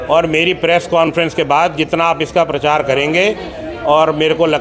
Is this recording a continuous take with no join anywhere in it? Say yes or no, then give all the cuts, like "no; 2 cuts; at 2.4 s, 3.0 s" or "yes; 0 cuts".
yes; 0 cuts